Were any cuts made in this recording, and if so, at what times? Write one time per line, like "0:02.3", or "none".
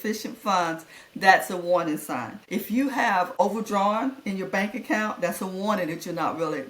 0:02.4
0:03.3